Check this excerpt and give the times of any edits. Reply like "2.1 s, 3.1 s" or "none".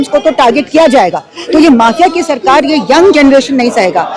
1.3 s